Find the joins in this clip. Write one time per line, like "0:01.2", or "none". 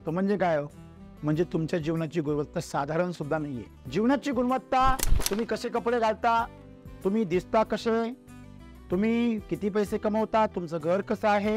none